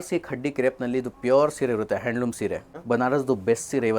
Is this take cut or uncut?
cut